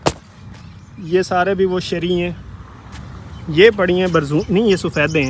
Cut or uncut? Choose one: uncut